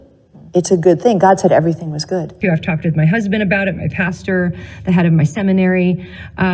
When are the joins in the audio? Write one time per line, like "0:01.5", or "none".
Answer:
0:02.3